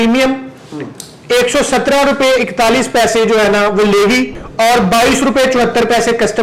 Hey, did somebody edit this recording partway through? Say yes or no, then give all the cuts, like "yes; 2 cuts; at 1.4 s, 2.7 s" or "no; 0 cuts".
yes; 1 cut; at 4.4 s